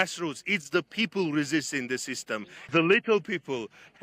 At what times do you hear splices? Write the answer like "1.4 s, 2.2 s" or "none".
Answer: 2.7 s